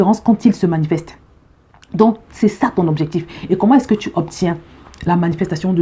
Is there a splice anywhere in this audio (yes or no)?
no